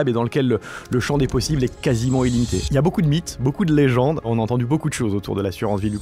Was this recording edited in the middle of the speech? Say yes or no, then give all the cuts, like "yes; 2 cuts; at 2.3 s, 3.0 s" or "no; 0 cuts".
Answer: yes; 2 cuts; at 2.6 s, 4.3 s